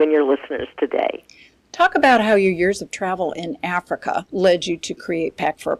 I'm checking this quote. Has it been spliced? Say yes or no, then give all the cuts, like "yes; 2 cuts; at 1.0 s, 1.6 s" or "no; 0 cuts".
yes; 1 cut; at 3.3 s